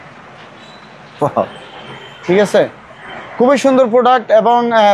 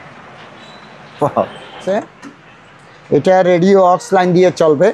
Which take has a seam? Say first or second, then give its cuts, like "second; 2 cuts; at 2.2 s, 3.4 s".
second; 1 cut; at 1.9 s